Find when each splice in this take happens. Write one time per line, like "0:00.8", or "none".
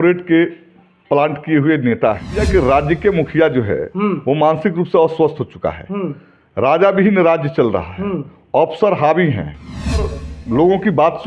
0:02.4
0:10.0